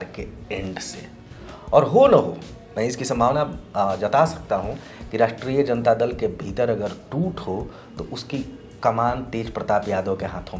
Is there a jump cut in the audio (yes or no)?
no